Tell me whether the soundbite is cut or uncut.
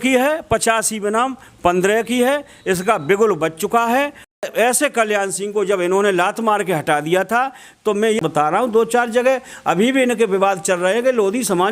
cut